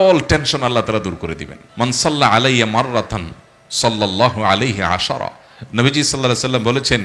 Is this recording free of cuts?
yes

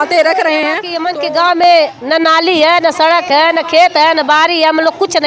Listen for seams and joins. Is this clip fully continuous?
no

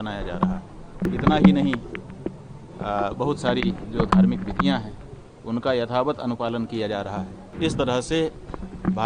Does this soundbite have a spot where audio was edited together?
yes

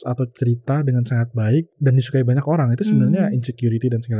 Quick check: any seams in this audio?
yes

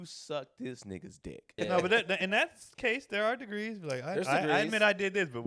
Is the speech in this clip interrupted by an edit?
yes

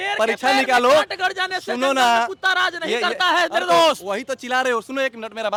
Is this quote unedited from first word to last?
yes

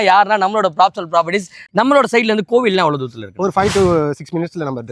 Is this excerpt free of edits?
no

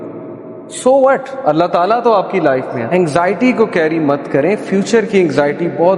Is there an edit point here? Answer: yes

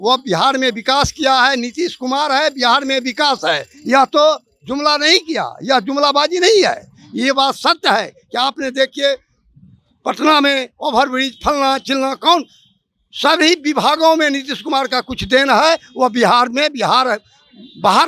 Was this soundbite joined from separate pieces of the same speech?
no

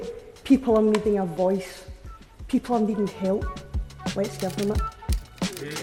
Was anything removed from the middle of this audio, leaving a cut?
no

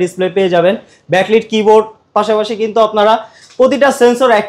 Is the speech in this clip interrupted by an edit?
no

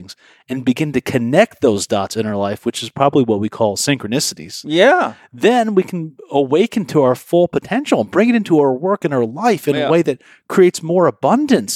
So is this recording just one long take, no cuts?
yes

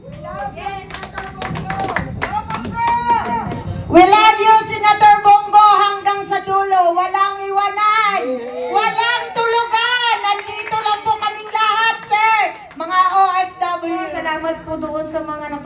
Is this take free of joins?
no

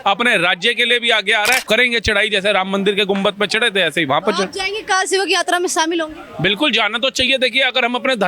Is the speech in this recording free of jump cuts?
no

